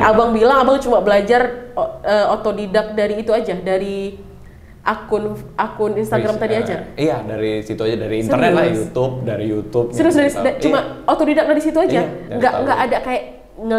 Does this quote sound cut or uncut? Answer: uncut